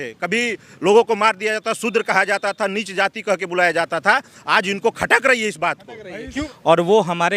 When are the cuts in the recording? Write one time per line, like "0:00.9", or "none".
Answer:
0:06.4

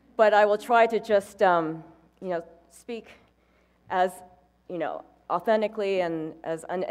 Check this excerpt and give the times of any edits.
0:01.2

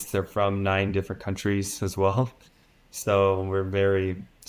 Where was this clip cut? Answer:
none

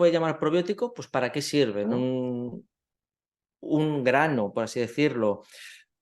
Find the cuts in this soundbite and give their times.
0:01.9

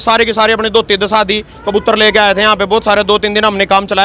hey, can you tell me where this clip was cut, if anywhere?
0:01.5

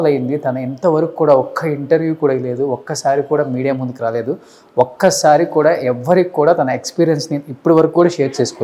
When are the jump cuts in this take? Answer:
none

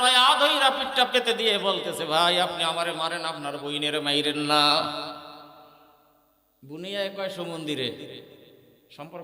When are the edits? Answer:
none

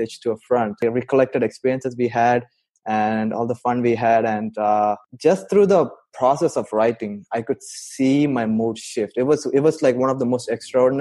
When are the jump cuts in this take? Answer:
0:00.8
0:05.1

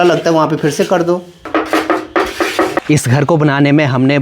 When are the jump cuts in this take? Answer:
0:01.5
0:02.8

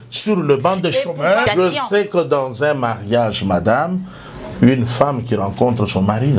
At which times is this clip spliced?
0:01.5

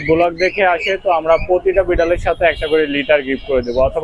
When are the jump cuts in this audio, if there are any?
none

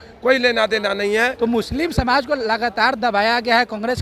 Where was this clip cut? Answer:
0:01.3

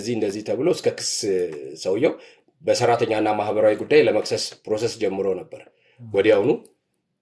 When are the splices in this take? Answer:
none

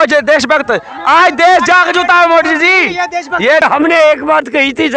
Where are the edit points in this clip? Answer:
0:03.6

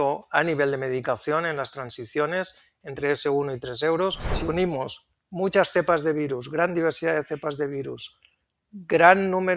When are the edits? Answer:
0:04.3

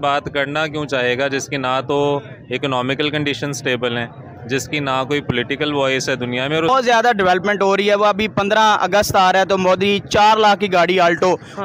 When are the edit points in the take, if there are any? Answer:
0:06.7

